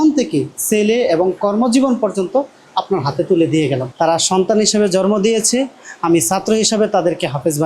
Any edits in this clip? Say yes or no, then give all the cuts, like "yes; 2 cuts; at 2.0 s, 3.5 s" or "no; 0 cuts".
yes; 1 cut; at 3.9 s